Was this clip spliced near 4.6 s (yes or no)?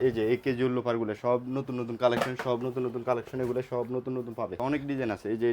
yes